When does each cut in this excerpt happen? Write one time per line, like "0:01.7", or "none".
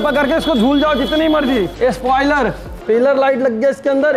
0:01.7
0:02.7